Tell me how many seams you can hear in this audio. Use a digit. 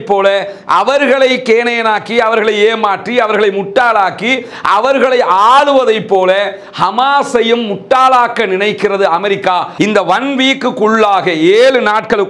1